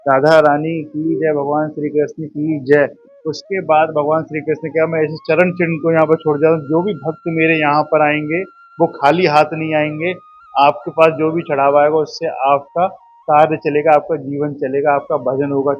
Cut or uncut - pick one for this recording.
uncut